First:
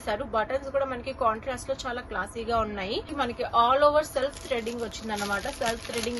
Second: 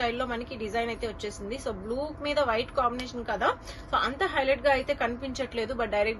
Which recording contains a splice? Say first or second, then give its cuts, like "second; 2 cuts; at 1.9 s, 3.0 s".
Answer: first; 1 cut; at 3.1 s